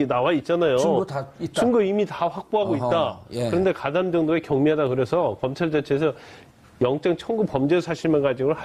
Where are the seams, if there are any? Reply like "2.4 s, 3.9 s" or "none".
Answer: 7.3 s